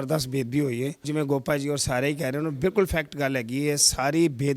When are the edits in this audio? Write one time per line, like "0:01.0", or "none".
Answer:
0:01.0